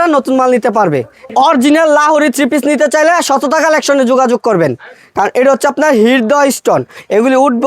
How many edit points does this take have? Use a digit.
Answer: 1